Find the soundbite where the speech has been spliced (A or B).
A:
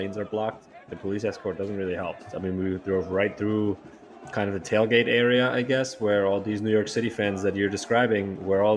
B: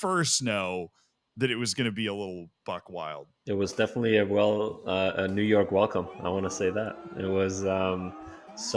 A